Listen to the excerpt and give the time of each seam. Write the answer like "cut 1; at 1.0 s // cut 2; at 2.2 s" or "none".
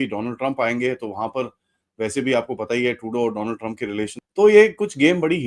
cut 1; at 4.2 s